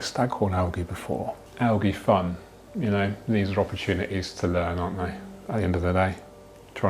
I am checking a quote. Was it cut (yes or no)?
yes